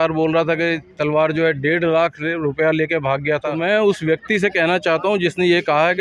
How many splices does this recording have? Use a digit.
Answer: 1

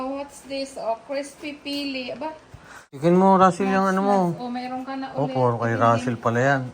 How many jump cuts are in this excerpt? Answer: 1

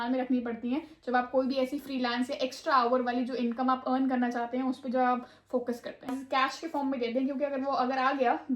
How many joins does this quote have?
1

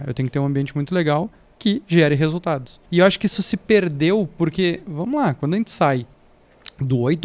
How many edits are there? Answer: 2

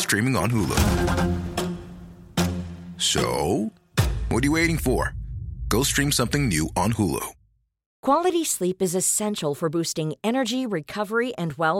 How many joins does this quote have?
1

